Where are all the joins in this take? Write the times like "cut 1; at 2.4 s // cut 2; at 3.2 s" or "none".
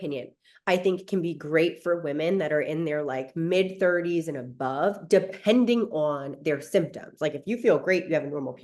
none